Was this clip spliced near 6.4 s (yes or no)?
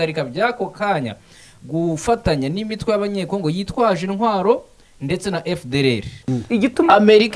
yes